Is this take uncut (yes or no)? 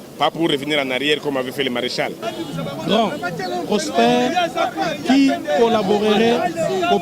no